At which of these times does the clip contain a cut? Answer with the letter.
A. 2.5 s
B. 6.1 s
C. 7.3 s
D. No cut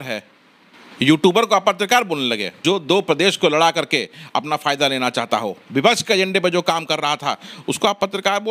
A